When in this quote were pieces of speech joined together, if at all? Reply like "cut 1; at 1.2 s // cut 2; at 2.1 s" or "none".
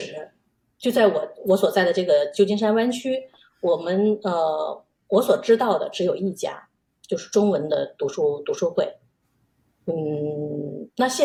none